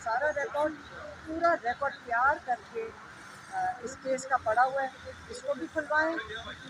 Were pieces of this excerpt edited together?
no; 0 cuts

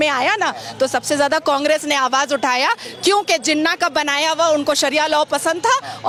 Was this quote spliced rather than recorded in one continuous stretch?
no; 0 cuts

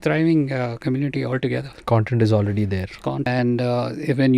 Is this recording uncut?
no; 1 cut; at 3.2 s

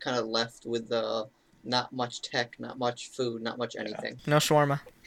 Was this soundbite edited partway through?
yes; 1 cut; at 4.1 s

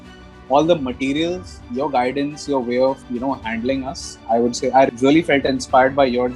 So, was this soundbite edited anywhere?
yes; 2 cuts; at 3.1 s, 4.9 s

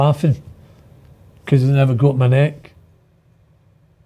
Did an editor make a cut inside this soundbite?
no; 0 cuts

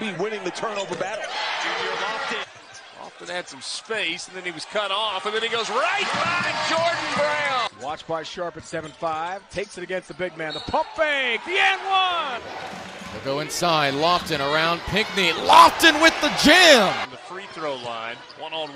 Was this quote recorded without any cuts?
no; 4 cuts; at 2.4 s, 7.7 s, 12.4 s, 17.1 s

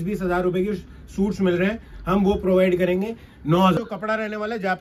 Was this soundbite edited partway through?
yes; 1 cut; at 3.8 s

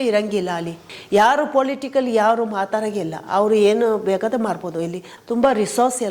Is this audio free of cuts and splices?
no; 2 cuts; at 0.9 s, 5.1 s

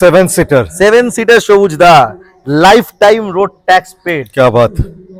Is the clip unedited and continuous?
yes; 0 cuts

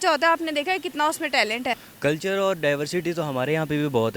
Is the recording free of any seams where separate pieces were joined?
no; 1 cut; at 1.9 s

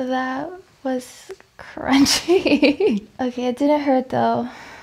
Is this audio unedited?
no; 1 cut; at 3.1 s

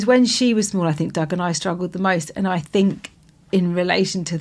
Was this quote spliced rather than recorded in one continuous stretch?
no; 0 cuts

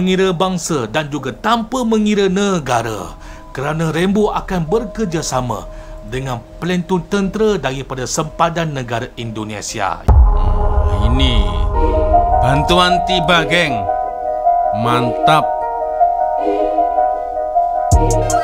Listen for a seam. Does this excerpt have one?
no; 0 cuts

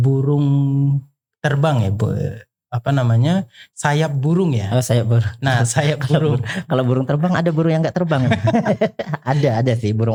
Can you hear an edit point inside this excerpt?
no; 0 cuts

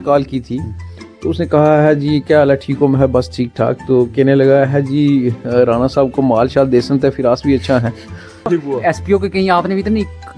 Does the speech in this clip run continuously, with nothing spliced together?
no; 1 cut; at 8.5 s

